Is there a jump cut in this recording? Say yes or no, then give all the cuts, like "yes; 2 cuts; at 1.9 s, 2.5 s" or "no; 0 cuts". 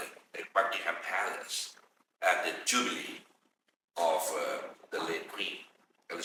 no; 0 cuts